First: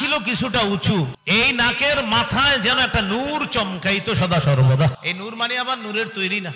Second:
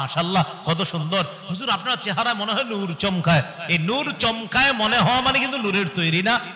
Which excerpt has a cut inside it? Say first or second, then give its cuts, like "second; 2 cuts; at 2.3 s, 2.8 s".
first; 2 cuts; at 1.2 s, 5.0 s